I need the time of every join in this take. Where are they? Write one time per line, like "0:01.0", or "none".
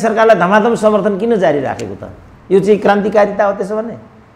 none

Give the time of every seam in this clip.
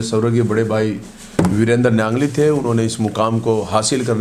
none

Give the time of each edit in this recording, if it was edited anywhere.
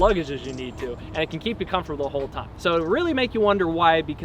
0:02.4

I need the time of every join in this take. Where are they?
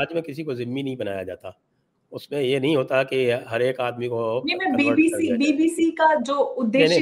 none

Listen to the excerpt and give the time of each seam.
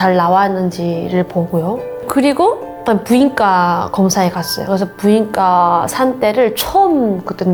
none

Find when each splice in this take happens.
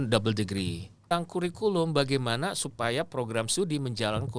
0:01.0

